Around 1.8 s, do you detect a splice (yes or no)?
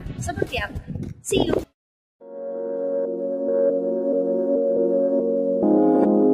yes